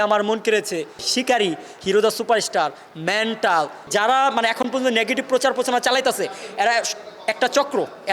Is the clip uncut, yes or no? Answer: no